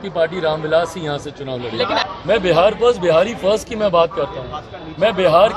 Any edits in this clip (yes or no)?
yes